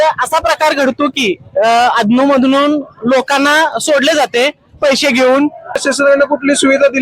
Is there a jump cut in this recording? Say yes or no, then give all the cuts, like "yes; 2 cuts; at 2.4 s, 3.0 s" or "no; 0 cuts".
yes; 1 cut; at 5.8 s